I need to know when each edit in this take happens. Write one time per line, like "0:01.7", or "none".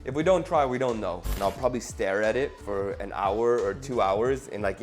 0:01.3